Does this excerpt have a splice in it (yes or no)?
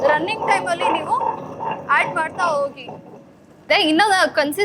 yes